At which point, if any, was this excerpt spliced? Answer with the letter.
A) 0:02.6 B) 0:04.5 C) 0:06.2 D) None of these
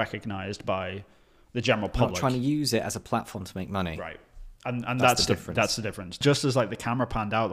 C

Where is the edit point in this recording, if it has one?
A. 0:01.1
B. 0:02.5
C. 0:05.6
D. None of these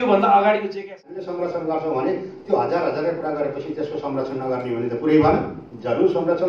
A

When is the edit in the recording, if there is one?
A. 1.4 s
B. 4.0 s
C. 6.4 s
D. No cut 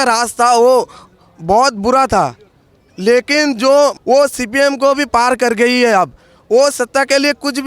B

